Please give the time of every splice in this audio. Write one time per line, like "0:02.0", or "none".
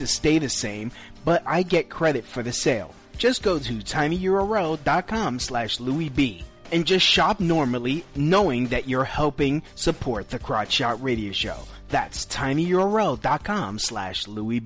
none